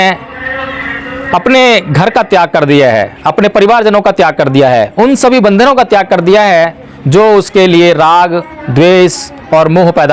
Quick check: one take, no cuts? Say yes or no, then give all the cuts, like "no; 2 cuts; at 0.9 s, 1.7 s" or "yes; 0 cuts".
yes; 0 cuts